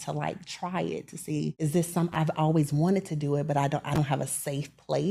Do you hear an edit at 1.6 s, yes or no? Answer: yes